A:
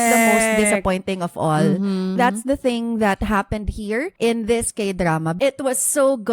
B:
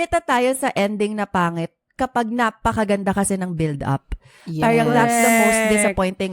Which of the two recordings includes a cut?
A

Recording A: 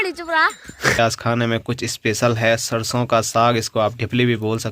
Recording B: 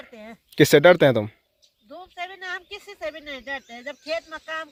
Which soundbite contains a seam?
A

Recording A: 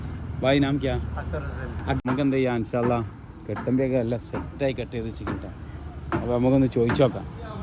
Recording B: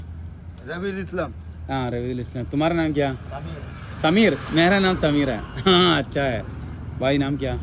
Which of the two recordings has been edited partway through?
A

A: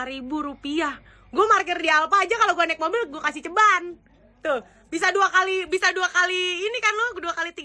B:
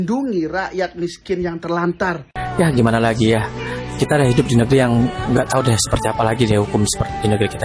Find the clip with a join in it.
B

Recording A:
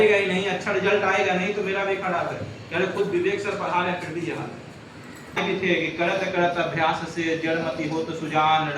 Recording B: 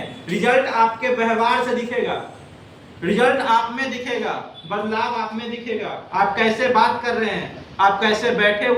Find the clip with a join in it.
A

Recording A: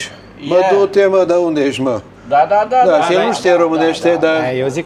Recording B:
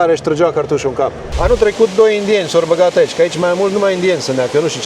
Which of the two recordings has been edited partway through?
B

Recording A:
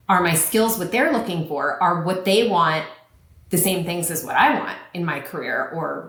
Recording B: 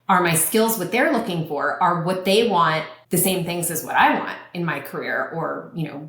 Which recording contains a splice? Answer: B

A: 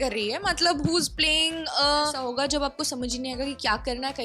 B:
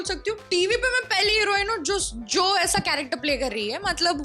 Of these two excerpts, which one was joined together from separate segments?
A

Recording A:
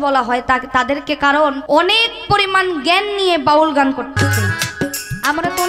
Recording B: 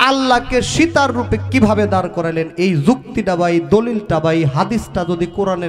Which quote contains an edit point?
A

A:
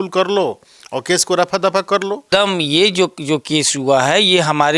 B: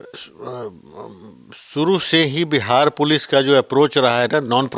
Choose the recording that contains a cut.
A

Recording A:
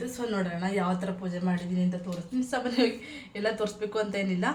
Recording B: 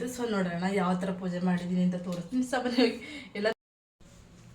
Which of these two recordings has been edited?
B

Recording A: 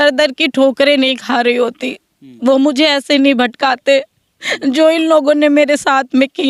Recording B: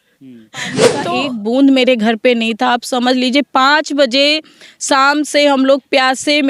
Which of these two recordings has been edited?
B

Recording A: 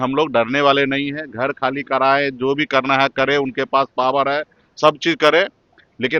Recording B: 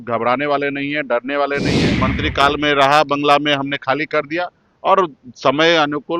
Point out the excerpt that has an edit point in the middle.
B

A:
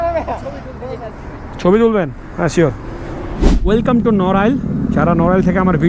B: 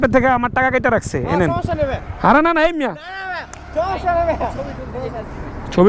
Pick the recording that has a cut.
A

